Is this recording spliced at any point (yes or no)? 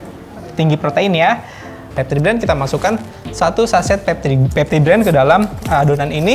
yes